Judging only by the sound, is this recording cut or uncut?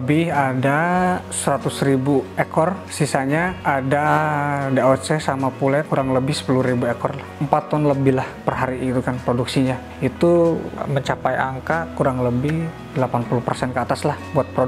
uncut